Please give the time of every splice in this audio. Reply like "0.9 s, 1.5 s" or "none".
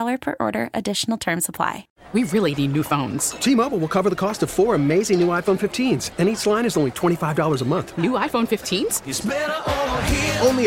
1.9 s

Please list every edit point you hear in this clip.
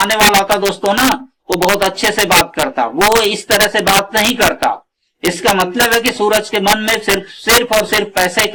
none

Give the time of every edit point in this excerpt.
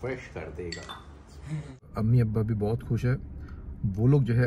1.9 s

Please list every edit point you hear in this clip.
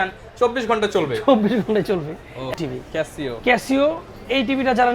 2.5 s

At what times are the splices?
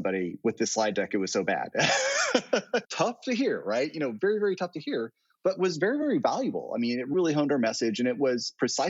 2.9 s

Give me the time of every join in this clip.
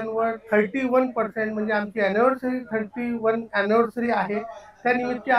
none

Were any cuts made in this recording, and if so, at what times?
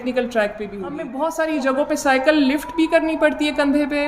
1.0 s

